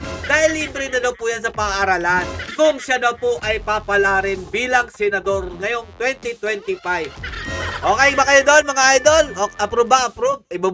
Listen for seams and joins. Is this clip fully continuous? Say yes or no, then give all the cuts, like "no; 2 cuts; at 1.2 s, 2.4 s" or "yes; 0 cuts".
no; 2 cuts; at 2.4 s, 7.3 s